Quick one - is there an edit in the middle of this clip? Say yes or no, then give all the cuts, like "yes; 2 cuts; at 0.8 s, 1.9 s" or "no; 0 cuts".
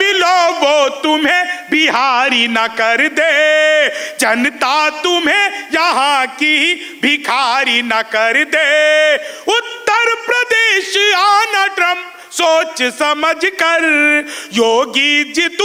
no; 0 cuts